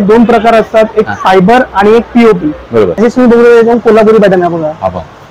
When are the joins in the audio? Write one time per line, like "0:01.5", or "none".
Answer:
0:02.9